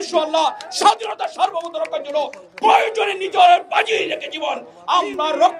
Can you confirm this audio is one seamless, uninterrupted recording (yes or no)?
yes